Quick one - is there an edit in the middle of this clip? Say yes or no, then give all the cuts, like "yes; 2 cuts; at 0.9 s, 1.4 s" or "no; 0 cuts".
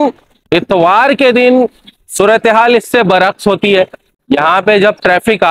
no; 0 cuts